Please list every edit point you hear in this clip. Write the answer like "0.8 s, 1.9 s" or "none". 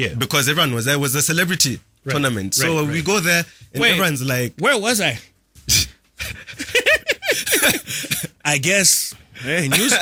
none